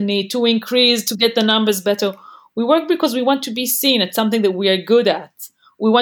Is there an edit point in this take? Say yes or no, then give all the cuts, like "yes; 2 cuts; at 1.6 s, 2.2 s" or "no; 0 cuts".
no; 0 cuts